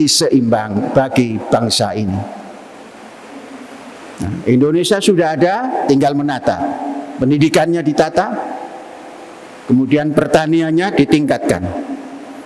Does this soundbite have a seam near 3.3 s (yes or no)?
yes